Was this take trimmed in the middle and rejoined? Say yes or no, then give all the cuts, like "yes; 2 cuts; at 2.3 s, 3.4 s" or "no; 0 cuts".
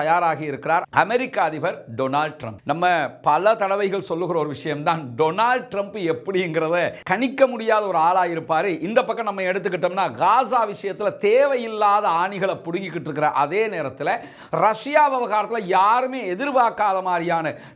no; 0 cuts